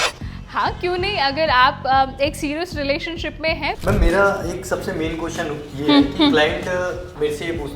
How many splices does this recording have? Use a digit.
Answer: 1